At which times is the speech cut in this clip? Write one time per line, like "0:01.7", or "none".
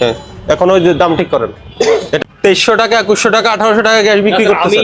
0:02.2

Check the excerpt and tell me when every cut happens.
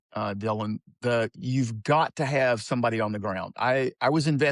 none

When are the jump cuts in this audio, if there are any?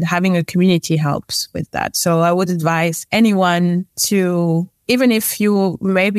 0:03.0
0:03.9
0:04.7

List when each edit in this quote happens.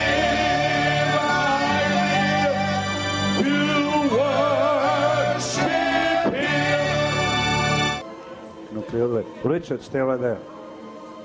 0:07.9

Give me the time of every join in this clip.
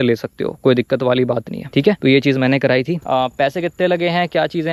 none

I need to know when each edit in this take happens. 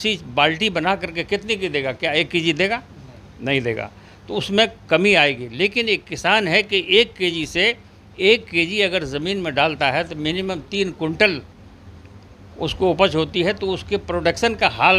none

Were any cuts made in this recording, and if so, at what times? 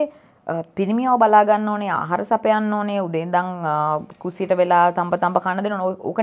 none

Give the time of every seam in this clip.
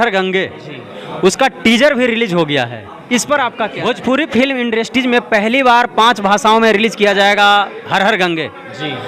0:03.8

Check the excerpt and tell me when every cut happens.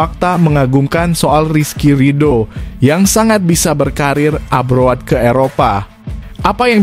none

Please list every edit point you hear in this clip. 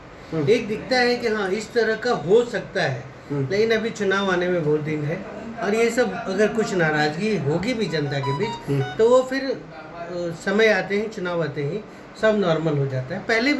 none

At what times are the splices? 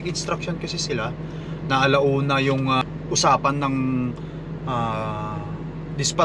0:02.8

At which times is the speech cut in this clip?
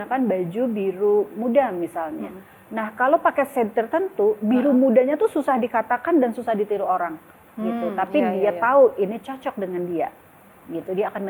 none

